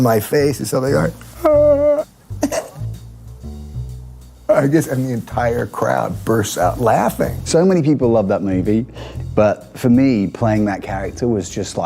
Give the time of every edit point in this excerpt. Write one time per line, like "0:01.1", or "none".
0:07.4